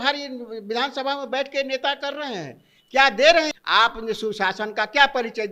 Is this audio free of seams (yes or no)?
no